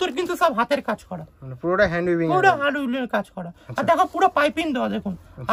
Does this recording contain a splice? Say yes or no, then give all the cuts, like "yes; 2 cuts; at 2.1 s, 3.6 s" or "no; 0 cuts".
no; 0 cuts